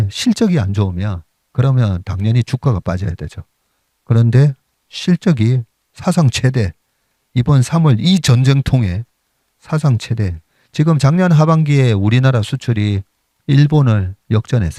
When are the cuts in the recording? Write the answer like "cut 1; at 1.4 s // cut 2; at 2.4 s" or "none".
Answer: none